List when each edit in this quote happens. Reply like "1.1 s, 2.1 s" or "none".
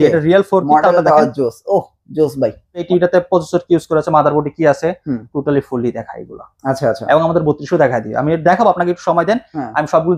2.9 s